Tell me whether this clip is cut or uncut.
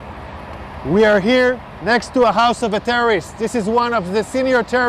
uncut